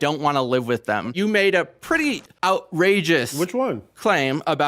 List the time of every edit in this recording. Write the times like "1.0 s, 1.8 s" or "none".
1.1 s, 2.3 s